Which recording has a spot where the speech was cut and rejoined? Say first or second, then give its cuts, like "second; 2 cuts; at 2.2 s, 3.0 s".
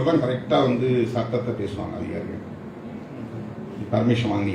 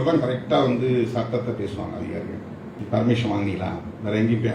second; 1 cut; at 2.8 s